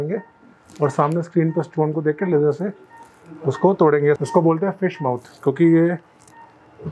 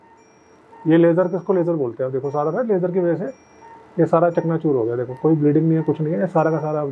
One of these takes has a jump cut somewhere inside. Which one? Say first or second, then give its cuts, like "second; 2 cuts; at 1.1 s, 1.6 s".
first; 1 cut; at 4.2 s